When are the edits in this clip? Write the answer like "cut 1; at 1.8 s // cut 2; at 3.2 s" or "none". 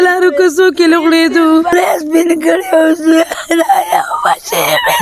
cut 1; at 1.7 s